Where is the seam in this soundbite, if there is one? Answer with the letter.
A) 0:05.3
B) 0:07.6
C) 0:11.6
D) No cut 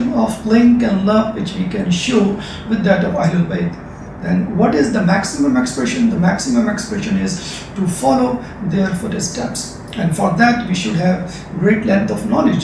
C